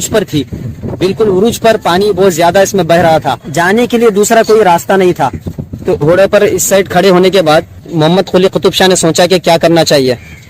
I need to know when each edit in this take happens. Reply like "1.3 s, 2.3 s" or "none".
3.4 s, 6.0 s, 7.9 s